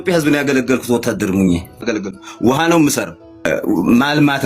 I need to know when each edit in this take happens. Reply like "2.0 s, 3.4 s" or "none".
1.9 s

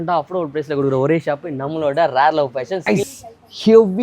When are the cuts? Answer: 2.8 s

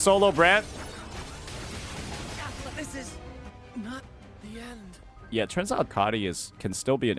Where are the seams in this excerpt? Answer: 5.9 s

